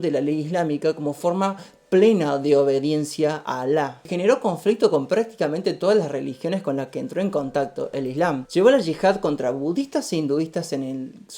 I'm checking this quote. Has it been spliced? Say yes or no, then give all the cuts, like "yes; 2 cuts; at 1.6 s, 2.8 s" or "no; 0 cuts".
yes; 2 cuts; at 4.0 s, 8.4 s